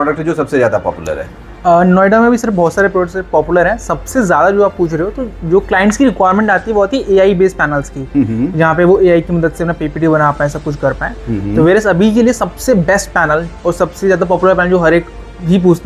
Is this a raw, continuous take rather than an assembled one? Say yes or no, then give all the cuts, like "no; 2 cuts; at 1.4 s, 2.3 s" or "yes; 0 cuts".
yes; 0 cuts